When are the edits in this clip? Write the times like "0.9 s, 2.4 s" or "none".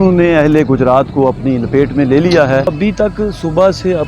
2.7 s

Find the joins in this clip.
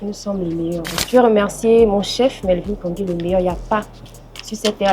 0.9 s

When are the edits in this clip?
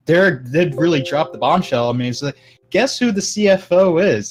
none

